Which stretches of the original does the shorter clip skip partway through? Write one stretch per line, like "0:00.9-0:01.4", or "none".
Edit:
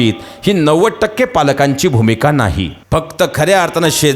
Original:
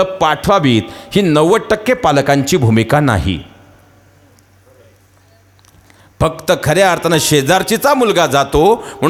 0:03.4-0:06.0